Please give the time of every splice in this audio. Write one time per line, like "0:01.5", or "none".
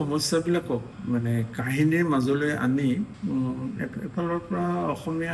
0:00.9
0:03.1